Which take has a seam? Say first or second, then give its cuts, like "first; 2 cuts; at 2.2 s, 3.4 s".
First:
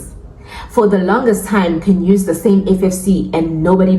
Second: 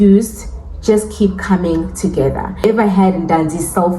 second; 1 cut; at 2.6 s